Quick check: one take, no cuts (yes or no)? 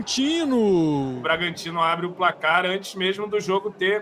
no